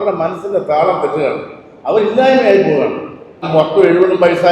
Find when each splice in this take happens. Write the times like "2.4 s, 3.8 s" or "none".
3.5 s